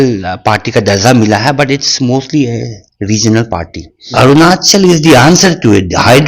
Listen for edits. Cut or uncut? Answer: cut